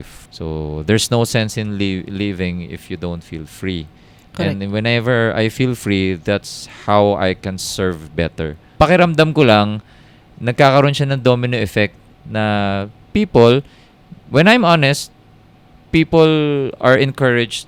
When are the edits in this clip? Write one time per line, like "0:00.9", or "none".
none